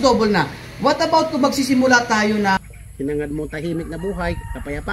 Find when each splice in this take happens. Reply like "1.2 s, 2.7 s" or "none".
2.6 s